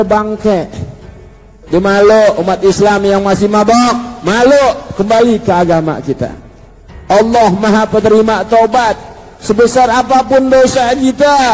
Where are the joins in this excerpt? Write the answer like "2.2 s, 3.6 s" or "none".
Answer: 1.5 s